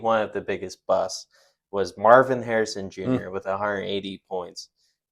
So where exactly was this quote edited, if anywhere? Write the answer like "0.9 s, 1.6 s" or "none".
none